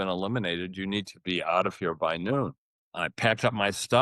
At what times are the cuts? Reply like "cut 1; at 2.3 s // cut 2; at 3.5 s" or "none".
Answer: cut 1; at 3.0 s